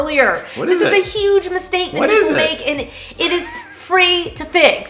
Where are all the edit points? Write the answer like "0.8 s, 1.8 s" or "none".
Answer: none